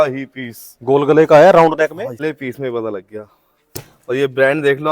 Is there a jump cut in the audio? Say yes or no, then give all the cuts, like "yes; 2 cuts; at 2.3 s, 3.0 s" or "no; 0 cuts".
yes; 1 cut; at 2.3 s